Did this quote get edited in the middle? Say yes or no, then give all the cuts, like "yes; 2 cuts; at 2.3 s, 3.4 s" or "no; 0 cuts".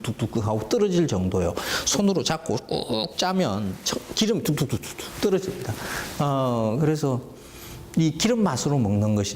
yes; 1 cut; at 4.7 s